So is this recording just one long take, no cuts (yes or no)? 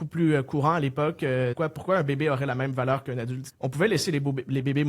no